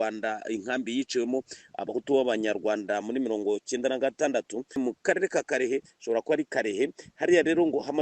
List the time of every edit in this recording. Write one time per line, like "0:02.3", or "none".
0:04.8